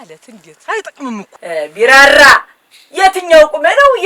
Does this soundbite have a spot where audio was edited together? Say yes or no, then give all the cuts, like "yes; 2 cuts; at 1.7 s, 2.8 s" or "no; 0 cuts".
yes; 1 cut; at 1.3 s